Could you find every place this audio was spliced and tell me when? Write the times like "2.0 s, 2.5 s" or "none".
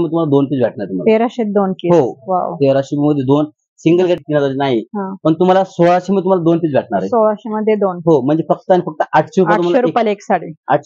4.2 s